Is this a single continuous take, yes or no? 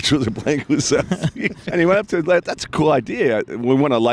no